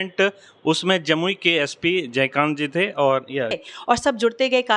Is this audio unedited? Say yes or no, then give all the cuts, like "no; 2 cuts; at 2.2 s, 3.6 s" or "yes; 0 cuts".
no; 1 cut; at 3.6 s